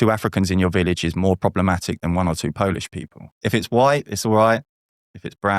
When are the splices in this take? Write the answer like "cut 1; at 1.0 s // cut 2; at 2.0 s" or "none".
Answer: cut 1; at 3.5 s